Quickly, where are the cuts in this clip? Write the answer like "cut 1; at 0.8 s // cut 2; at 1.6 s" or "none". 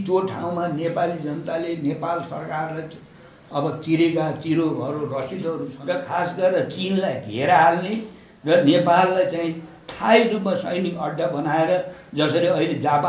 cut 1; at 5.7 s